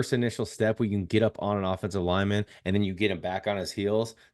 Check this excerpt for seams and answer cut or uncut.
uncut